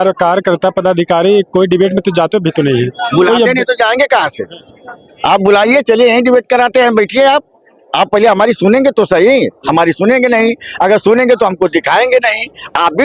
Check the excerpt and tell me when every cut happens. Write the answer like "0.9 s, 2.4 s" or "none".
none